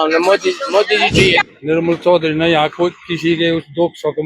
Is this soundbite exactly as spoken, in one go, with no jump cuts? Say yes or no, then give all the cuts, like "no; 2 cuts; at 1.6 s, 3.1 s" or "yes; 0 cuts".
no; 1 cut; at 1.4 s